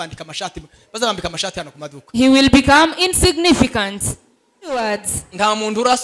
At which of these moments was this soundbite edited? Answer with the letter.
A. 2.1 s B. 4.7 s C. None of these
B